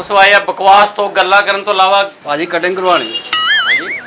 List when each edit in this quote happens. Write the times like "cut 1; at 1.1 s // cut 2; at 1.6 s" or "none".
cut 1; at 2.2 s